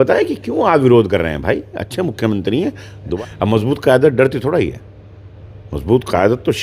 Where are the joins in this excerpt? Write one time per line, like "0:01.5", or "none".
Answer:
0:03.1